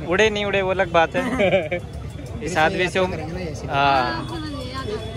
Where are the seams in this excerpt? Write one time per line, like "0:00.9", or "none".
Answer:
none